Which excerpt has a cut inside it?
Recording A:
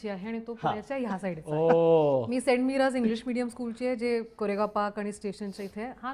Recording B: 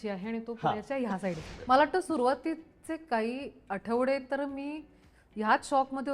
B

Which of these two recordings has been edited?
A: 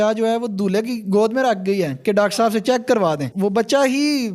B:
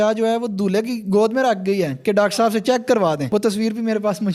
A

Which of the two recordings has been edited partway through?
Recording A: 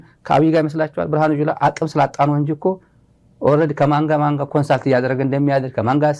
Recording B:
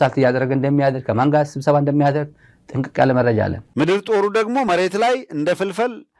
B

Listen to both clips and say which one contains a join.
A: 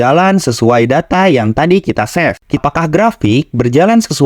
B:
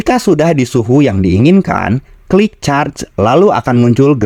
A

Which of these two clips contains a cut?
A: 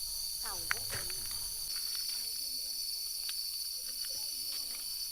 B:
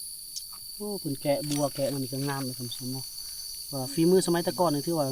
A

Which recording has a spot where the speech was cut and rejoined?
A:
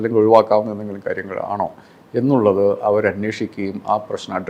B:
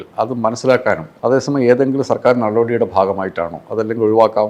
B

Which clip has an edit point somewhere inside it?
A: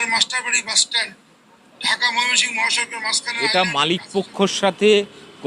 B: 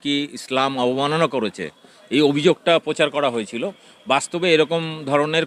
A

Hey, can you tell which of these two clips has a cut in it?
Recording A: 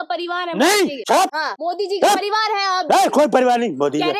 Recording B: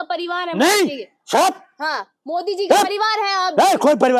A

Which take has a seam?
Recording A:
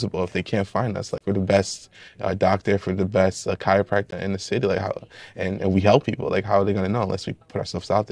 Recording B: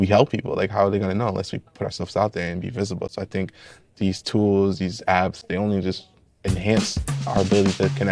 A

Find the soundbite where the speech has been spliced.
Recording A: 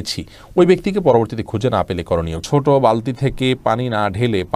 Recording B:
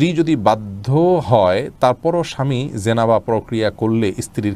A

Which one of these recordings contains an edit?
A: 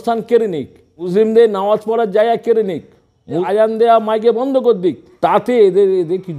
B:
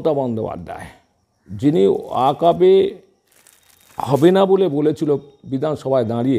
A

